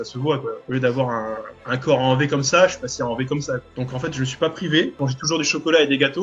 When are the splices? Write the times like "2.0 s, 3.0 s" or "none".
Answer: 3.7 s, 5.0 s